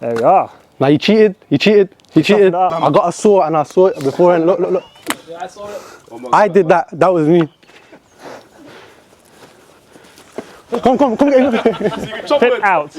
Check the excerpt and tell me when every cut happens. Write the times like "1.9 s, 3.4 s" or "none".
2.7 s, 4.9 s